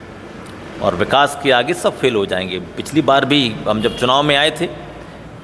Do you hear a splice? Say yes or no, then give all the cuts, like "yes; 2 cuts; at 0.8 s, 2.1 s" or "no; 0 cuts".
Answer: no; 0 cuts